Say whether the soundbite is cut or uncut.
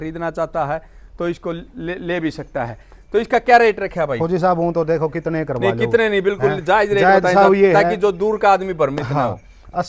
uncut